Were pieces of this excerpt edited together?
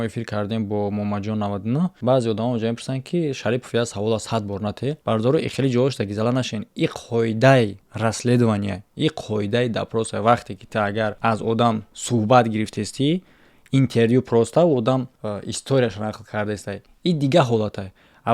yes; 3 cuts; at 5.0 s, 7.8 s, 11.2 s

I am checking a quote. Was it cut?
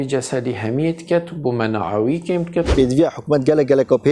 yes; 1 cut; at 2.7 s

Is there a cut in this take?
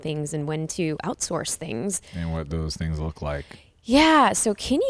no; 0 cuts

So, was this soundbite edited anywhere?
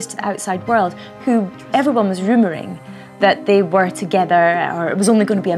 no; 0 cuts

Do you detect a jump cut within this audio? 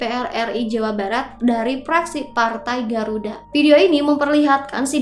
yes; 1 cut; at 3.4 s

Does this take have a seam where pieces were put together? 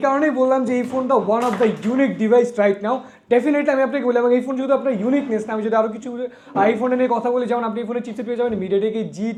no; 0 cuts

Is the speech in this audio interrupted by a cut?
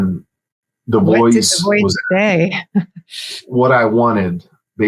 yes; 1 cut; at 3.4 s

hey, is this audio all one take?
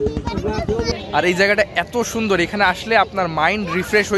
no; 1 cut; at 1.0 s

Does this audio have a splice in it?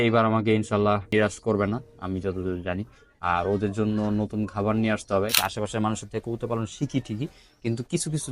yes; 2 cuts; at 1.1 s, 5.3 s

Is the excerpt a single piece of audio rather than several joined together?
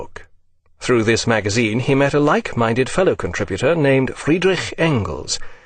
yes; 0 cuts

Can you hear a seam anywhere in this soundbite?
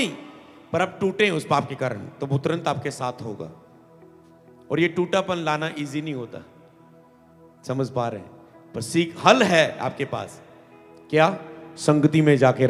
no; 0 cuts

